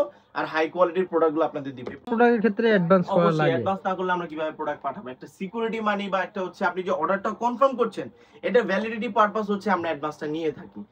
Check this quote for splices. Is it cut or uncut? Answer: cut